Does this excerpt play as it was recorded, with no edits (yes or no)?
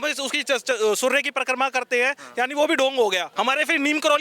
no